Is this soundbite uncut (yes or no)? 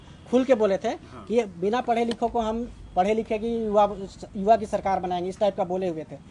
yes